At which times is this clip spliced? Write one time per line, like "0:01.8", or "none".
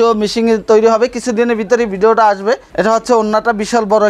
none